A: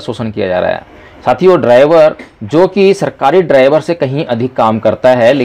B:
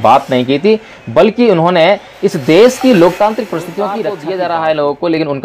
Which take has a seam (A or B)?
B